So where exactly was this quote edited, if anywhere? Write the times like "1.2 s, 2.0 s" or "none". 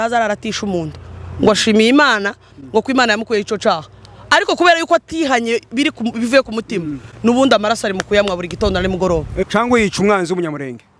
9.4 s